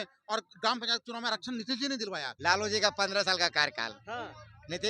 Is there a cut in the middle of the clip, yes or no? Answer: yes